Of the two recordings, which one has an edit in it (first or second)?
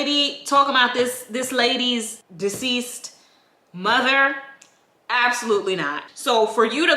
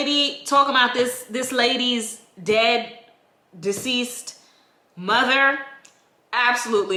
first